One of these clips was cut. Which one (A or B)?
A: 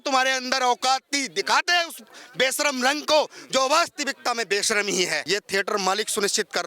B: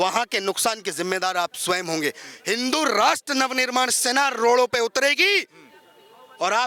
A